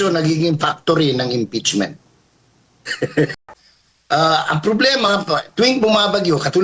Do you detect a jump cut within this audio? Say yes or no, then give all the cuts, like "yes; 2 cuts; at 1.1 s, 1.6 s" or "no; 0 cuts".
yes; 1 cut; at 3.3 s